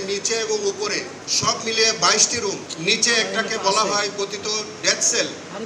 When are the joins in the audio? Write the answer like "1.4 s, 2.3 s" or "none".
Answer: 1.2 s, 2.7 s